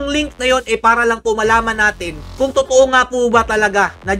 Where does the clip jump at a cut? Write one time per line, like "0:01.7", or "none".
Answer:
none